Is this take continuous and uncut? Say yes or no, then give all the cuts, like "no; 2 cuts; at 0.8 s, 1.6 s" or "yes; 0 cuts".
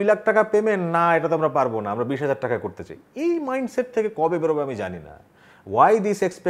yes; 0 cuts